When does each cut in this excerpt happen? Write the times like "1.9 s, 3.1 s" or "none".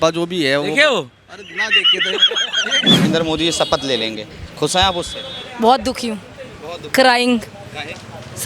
3.1 s